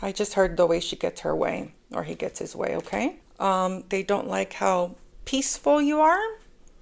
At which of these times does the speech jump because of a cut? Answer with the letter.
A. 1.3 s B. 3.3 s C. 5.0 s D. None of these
B